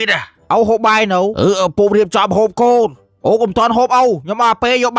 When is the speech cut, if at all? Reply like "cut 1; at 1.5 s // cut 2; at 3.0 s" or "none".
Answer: none